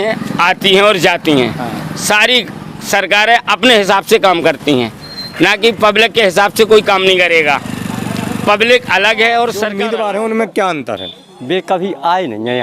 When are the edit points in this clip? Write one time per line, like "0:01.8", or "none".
0:09.7